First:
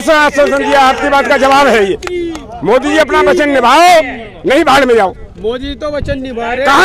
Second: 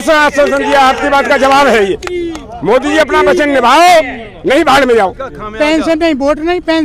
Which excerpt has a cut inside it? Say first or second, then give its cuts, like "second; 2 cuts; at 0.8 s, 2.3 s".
second; 1 cut; at 5.3 s